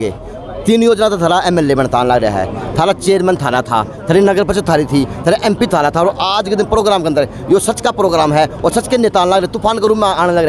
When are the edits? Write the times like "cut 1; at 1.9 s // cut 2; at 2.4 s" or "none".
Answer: none